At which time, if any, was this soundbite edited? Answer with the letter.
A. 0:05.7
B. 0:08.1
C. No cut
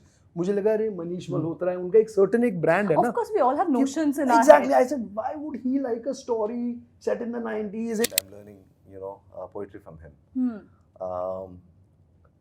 B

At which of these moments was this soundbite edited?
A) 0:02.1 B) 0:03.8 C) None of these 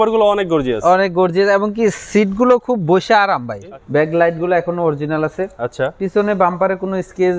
B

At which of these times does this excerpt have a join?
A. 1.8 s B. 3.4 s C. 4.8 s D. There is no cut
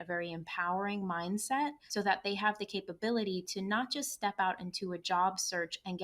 A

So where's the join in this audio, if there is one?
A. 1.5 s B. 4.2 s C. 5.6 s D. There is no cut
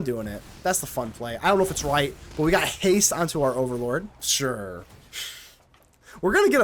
B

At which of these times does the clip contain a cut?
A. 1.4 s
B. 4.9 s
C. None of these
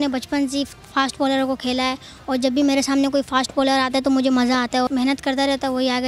B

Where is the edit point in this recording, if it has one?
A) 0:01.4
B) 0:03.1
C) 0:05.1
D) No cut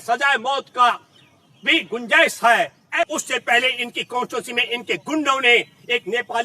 B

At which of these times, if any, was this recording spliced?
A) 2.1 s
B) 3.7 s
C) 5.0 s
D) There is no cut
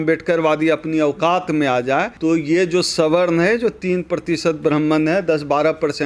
A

